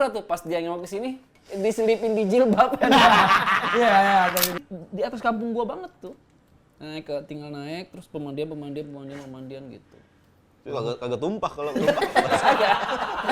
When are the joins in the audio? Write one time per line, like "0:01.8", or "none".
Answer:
0:04.6